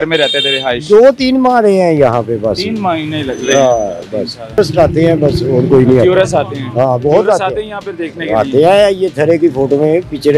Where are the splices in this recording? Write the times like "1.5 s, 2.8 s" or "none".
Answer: 4.6 s